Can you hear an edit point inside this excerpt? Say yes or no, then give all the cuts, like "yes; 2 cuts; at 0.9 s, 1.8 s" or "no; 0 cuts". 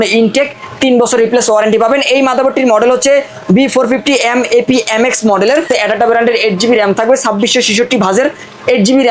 yes; 1 cut; at 5.7 s